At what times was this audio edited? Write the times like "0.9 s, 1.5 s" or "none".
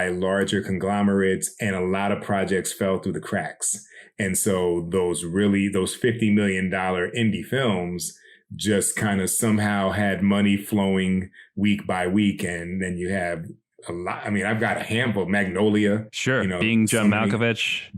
none